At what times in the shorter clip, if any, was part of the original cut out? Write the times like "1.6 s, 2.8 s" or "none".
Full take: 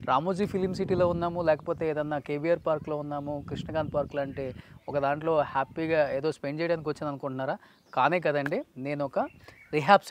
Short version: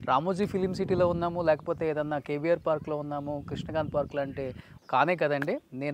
4.7 s